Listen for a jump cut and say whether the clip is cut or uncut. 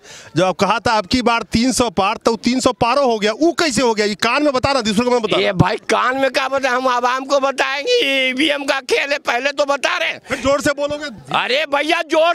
uncut